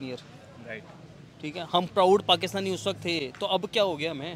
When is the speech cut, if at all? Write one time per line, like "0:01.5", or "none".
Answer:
none